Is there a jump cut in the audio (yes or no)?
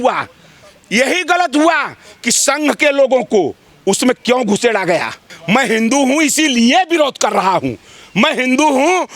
yes